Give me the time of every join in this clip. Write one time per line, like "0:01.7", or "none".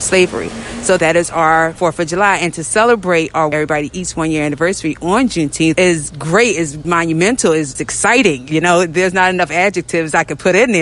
0:01.0
0:01.7
0:03.5
0:05.8
0:06.8
0:07.7